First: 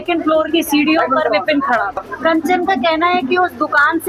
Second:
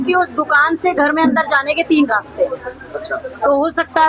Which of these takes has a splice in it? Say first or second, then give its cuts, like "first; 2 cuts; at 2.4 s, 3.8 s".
first; 1 cut; at 2.0 s